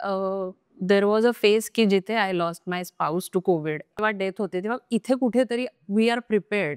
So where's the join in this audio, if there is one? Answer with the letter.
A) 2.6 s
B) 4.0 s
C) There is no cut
B